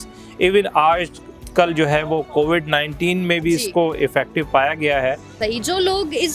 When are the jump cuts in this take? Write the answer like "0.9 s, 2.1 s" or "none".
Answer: 5.4 s